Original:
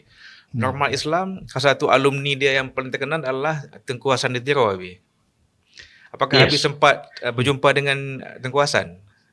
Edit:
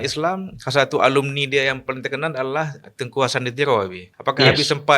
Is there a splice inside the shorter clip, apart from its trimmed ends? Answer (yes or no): yes